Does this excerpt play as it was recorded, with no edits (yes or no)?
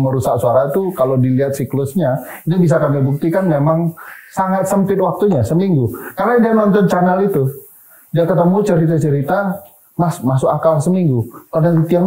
yes